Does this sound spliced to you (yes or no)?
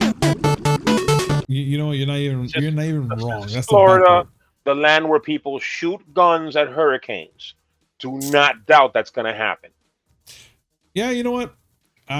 yes